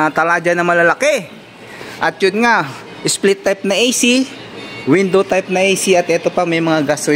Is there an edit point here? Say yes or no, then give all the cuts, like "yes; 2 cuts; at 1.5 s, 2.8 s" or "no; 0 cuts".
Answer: no; 0 cuts